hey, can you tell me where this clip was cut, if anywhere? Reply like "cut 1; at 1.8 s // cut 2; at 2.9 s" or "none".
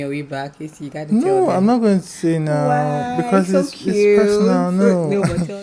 none